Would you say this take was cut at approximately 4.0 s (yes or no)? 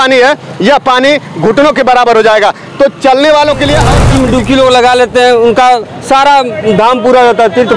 yes